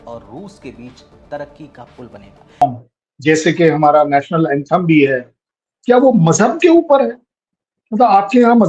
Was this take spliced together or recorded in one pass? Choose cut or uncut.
cut